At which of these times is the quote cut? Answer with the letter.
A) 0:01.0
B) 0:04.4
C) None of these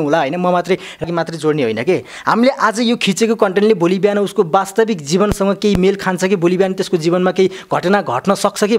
A